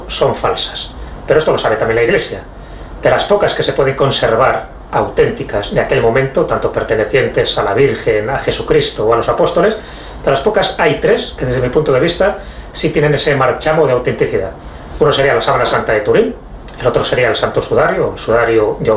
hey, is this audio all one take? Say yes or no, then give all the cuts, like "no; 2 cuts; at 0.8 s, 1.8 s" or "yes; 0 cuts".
yes; 0 cuts